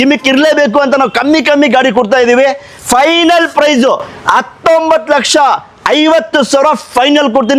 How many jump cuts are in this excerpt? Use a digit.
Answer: 0